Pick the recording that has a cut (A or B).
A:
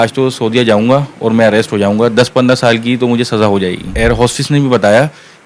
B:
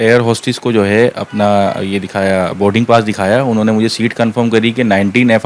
A